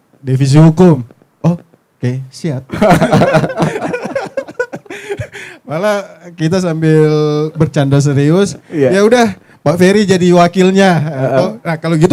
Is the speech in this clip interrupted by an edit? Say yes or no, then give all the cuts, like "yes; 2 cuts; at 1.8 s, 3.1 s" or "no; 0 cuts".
no; 0 cuts